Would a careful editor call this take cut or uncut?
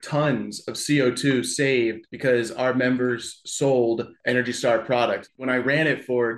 cut